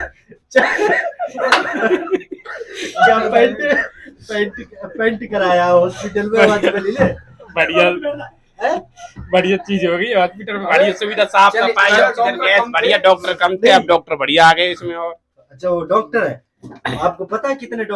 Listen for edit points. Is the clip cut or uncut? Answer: uncut